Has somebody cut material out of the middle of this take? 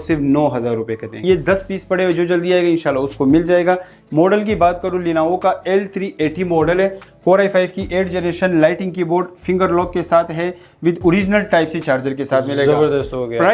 yes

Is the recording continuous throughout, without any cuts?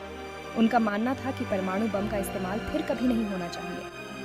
yes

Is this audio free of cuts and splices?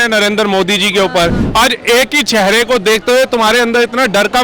no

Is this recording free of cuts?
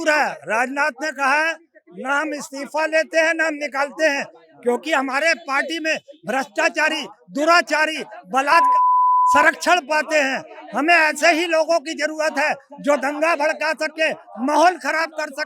yes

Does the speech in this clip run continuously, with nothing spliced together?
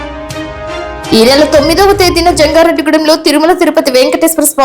no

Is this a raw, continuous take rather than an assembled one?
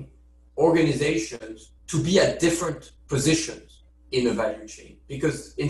yes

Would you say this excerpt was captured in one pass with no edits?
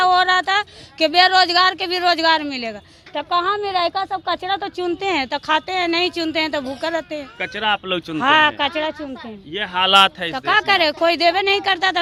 yes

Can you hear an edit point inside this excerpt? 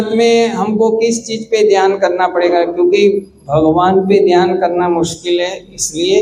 no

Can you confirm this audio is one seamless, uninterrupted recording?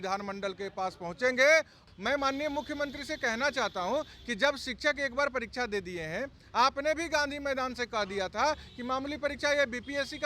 no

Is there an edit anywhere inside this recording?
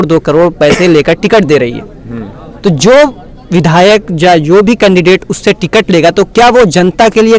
no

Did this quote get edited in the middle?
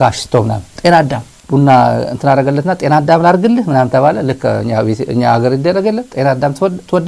no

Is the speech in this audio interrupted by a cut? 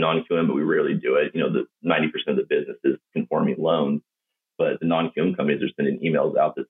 no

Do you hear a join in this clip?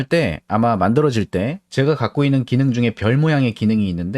yes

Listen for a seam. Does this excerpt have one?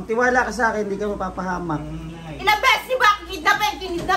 no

